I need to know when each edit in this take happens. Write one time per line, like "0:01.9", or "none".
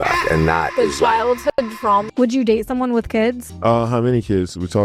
0:02.0
0:03.5